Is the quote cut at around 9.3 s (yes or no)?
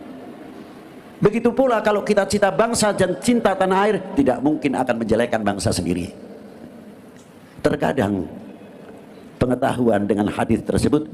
no